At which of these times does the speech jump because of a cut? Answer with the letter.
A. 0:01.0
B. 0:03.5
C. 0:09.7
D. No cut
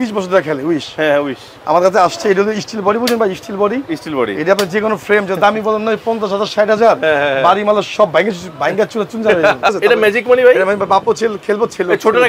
C